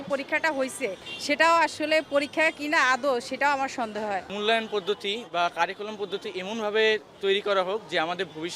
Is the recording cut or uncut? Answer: cut